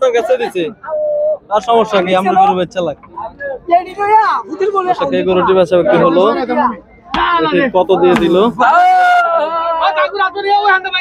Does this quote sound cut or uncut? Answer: uncut